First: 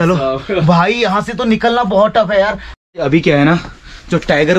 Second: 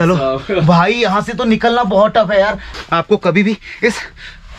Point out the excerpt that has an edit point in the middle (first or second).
second